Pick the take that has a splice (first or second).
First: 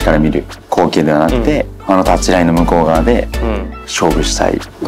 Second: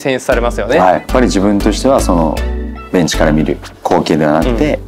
second